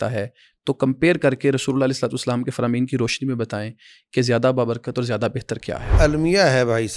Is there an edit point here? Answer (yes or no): yes